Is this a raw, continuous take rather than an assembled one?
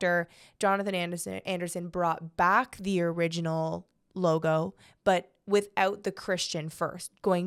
yes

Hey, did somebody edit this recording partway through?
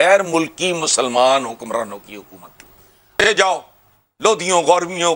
yes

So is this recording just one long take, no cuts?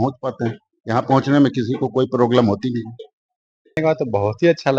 no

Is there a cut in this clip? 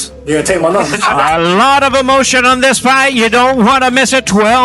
yes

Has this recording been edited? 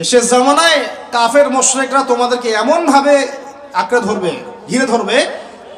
no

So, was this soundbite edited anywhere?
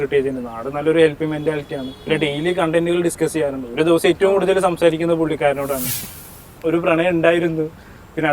yes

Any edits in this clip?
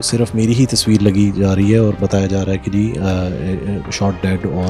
no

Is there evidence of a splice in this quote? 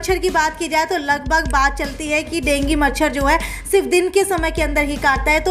no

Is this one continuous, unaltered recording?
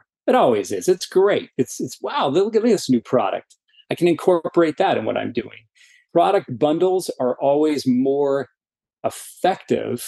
no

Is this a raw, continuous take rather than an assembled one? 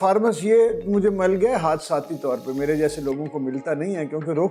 yes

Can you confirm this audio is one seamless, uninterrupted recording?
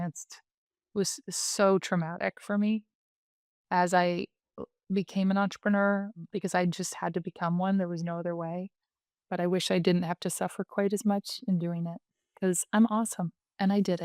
yes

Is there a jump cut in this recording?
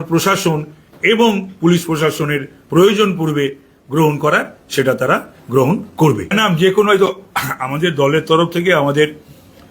no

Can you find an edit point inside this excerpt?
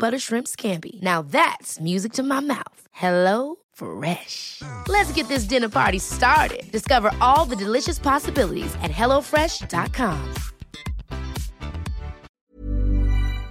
yes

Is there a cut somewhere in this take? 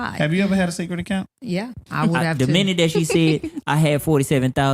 yes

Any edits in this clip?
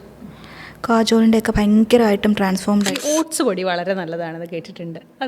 yes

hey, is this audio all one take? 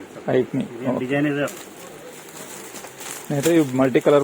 no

